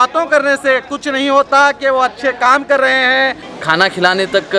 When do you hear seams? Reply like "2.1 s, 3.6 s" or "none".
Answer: 3.4 s